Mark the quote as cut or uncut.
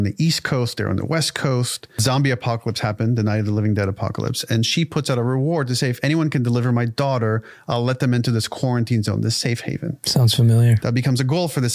cut